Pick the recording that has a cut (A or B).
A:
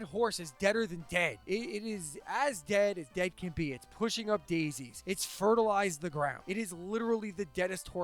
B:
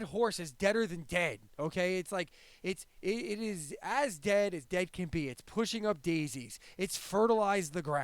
A